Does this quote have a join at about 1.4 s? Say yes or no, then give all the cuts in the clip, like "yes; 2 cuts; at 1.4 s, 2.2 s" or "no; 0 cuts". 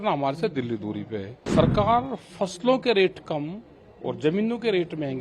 yes; 1 cut; at 1.4 s